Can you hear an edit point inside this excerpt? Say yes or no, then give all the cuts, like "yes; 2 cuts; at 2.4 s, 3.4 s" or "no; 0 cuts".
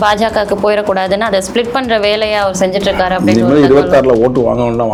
no; 0 cuts